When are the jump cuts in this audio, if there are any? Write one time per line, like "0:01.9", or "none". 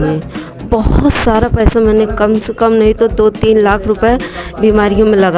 none